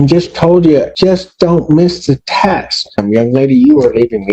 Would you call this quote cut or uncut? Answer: cut